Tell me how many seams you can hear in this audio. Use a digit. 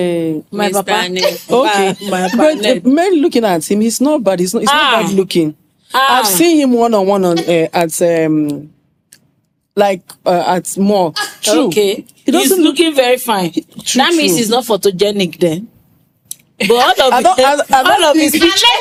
0